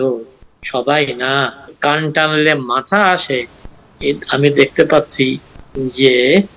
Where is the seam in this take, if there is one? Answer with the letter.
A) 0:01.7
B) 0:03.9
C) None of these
A